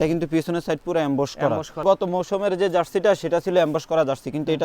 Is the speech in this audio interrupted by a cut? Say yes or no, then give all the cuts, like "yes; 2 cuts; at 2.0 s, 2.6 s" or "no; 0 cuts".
yes; 1 cut; at 1.8 s